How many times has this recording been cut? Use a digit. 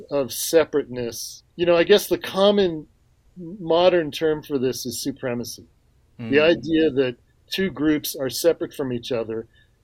1